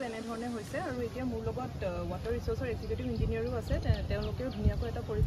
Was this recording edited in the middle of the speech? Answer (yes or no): no